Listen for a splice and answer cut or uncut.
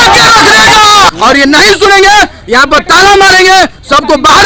cut